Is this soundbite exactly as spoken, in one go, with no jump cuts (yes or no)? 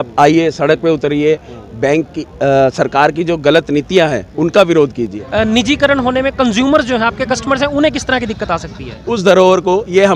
no